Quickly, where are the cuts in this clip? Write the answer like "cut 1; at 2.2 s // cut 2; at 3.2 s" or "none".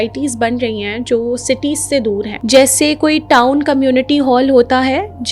cut 1; at 2.4 s